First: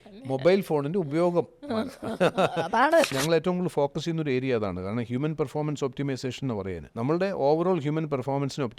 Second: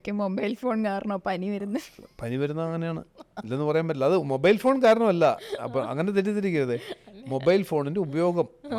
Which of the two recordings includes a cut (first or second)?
first